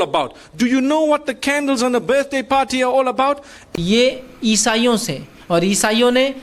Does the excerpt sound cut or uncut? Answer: cut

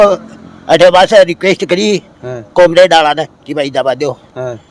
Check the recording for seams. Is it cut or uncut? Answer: uncut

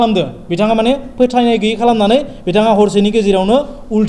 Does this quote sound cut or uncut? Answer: uncut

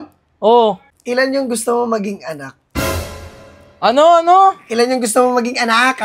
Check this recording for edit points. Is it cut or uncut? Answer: cut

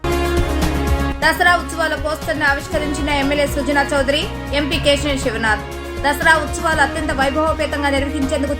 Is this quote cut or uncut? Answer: cut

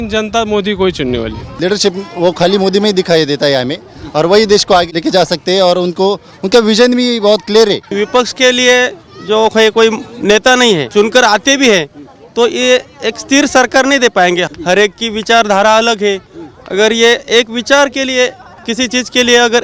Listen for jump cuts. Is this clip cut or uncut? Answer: cut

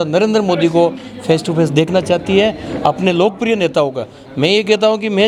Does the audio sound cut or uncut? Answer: uncut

